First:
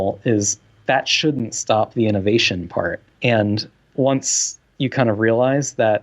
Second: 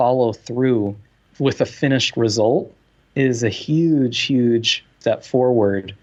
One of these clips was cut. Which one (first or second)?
first